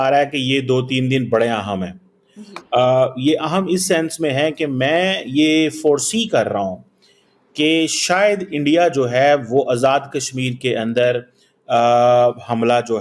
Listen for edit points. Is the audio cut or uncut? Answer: uncut